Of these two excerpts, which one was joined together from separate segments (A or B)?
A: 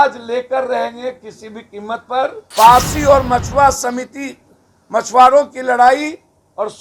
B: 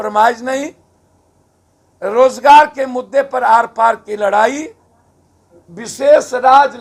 A